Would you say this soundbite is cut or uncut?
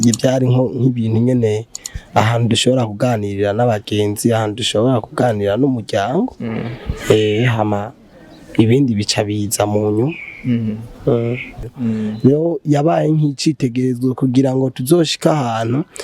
cut